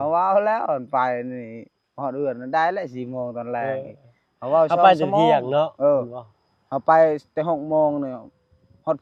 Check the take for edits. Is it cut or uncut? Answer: uncut